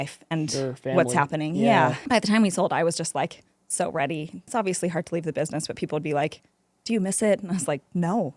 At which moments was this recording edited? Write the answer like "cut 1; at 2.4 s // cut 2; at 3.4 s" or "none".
cut 1; at 2.0 s // cut 2; at 4.5 s

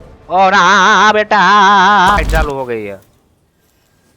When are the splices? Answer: cut 1; at 2.2 s

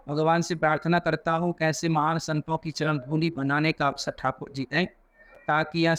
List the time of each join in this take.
none

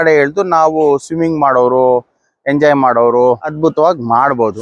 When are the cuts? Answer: cut 1; at 3.7 s

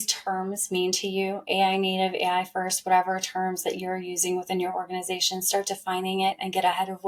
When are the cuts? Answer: none

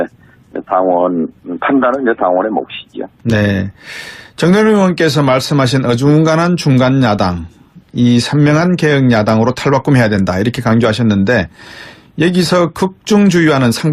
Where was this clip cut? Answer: cut 1; at 10.5 s

